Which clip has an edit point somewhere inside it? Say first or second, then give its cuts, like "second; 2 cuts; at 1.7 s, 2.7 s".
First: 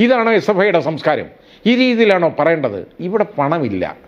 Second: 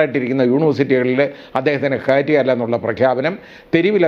first; 1 cut; at 3.0 s